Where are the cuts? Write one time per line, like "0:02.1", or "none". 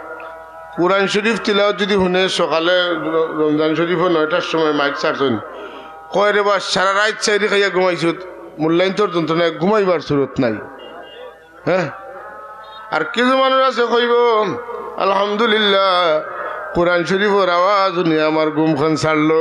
none